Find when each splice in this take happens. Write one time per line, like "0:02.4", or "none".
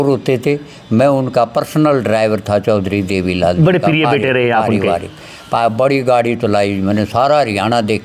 none

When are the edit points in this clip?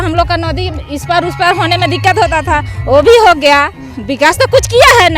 none

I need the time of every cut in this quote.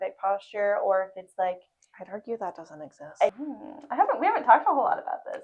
0:03.4

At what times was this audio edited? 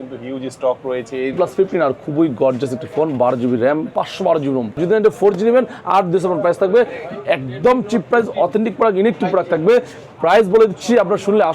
0:01.3
0:04.8

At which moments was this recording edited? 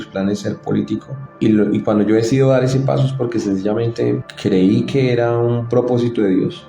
0:01.2
0:04.3

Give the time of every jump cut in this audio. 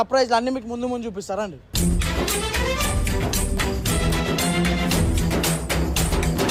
none

